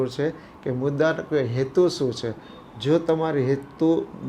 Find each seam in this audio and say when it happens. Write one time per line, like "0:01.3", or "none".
none